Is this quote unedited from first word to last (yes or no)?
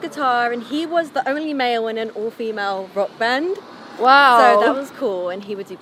yes